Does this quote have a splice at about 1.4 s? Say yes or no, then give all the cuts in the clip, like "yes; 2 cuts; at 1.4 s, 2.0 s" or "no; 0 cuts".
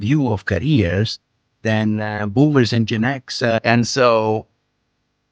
no; 1 cut; at 3.6 s